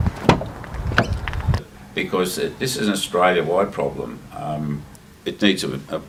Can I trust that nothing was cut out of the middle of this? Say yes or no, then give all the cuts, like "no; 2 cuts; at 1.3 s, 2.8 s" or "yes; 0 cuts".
yes; 0 cuts